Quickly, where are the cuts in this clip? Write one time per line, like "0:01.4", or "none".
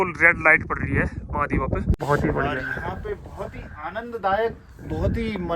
0:02.0